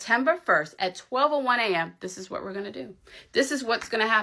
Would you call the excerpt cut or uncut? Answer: uncut